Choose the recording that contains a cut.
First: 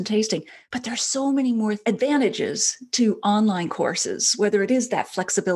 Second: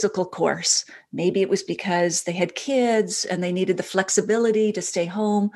first; 1 cut; at 1.8 s

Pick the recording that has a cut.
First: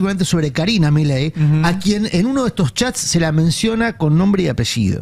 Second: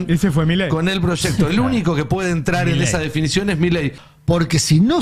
second; 1 cut; at 4.1 s

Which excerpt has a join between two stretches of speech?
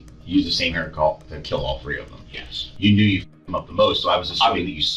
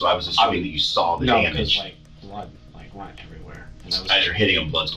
first; 1 cut; at 2.7 s

